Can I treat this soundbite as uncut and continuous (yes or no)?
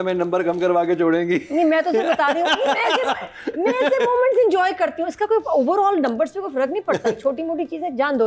yes